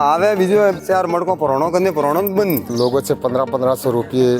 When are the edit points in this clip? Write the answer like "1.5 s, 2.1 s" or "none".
0.8 s, 2.7 s

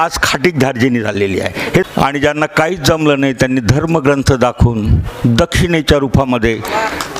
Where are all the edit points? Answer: 1.8 s

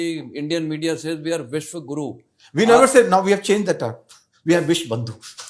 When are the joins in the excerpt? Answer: none

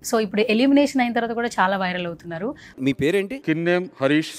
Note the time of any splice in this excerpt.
2.6 s

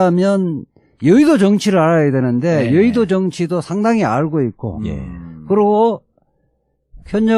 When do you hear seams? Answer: 4.0 s

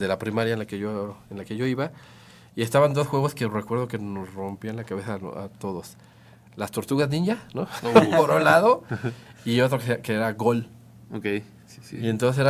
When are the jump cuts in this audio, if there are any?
none

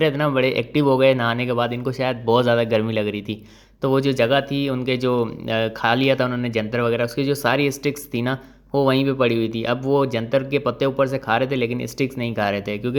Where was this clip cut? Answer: none

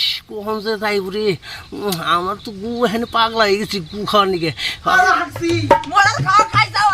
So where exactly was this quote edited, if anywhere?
4.9 s

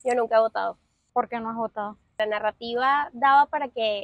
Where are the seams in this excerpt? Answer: 0.9 s, 2.2 s

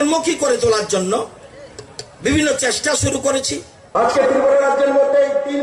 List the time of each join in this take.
3.8 s

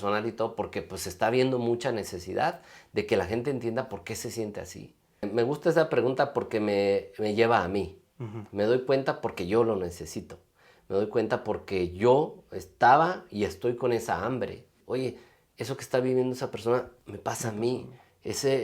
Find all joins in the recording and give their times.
5.2 s, 14.7 s

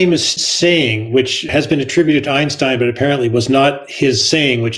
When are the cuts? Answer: 1.5 s

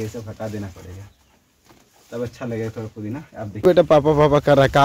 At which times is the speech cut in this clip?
3.9 s

